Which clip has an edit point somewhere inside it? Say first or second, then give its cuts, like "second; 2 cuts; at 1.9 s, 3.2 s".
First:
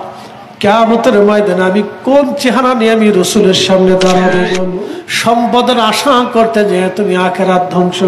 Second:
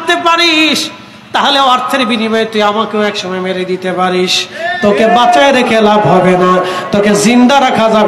first; 1 cut; at 4.7 s